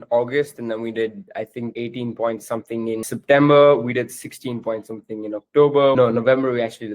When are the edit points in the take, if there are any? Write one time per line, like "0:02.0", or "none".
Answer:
0:01.7
0:03.0
0:06.0